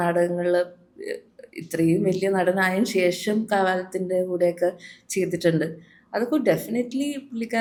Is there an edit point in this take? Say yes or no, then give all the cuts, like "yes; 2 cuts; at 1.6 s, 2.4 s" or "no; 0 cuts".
no; 0 cuts